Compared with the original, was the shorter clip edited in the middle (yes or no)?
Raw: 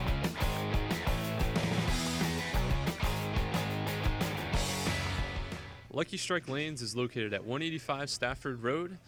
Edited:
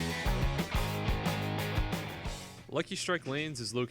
yes